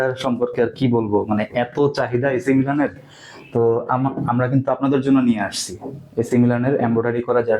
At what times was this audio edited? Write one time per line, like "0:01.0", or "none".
none